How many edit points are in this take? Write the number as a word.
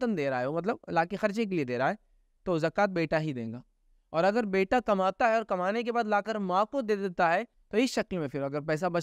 one